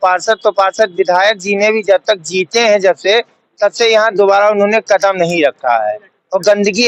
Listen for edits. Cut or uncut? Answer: uncut